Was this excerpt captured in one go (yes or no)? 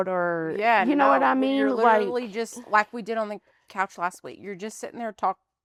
yes